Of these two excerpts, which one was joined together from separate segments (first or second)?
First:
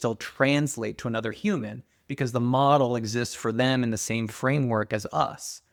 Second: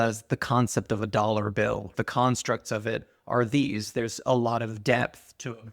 second